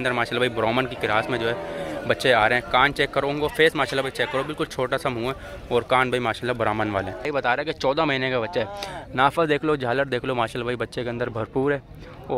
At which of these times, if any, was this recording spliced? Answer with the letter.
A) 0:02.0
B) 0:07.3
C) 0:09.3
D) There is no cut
B